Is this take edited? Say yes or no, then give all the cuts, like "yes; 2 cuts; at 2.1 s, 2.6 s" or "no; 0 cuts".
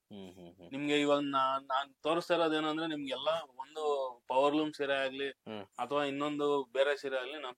no; 0 cuts